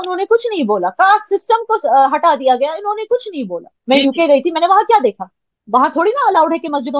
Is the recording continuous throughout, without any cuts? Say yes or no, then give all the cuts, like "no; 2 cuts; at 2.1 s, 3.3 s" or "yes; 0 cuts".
no; 1 cut; at 3.7 s